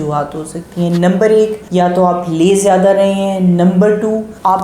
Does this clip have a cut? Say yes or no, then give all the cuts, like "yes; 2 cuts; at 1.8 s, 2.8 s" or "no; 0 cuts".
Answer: no; 0 cuts